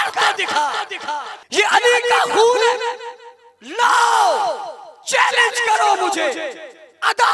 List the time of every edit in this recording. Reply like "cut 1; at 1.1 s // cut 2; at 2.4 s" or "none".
cut 1; at 1.4 s